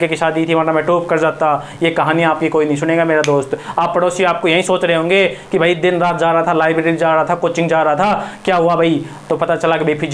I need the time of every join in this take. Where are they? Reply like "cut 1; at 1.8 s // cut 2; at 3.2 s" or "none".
none